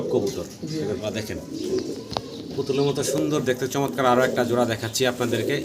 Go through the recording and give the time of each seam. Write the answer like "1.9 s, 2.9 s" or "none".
1.0 s